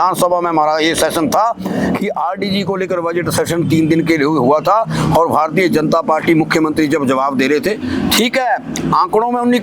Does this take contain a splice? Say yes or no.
no